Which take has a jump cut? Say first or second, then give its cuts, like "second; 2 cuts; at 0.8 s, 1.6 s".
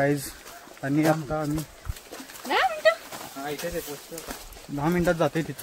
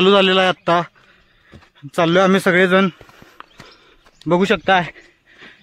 first; 1 cut; at 3.6 s